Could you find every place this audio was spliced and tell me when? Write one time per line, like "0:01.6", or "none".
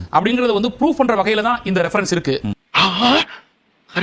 0:02.6